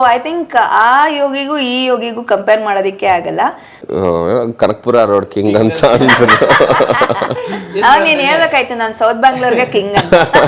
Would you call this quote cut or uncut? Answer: cut